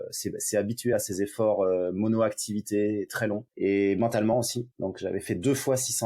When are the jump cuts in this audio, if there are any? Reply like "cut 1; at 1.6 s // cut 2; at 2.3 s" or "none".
cut 1; at 3.5 s // cut 2; at 4.6 s